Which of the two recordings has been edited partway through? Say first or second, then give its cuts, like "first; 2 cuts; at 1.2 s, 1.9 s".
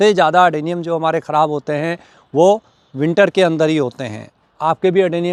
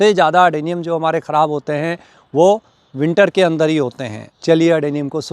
second; 1 cut; at 4.3 s